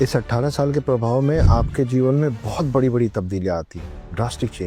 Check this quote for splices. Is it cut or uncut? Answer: uncut